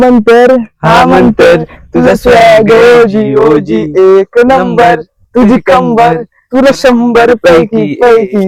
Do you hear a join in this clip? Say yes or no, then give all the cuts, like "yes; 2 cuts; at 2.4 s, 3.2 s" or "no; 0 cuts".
no; 0 cuts